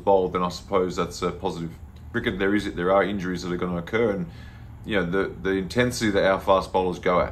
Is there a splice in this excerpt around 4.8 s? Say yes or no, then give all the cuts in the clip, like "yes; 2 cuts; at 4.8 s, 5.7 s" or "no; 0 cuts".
no; 1 cut; at 2.1 s